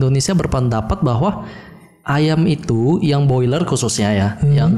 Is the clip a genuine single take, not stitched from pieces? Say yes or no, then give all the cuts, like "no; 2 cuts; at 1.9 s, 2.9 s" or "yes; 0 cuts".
yes; 0 cuts